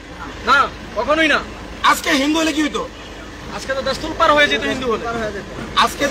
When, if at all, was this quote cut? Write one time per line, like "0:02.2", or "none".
none